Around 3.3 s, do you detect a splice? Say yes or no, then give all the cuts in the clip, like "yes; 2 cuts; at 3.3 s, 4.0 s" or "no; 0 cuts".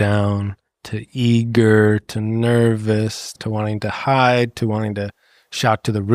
yes; 1 cut; at 3.3 s